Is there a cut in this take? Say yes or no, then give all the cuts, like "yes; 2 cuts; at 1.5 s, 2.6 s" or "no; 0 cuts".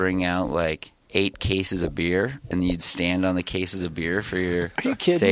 no; 0 cuts